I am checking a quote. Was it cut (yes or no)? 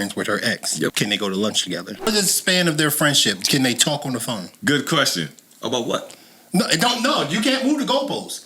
yes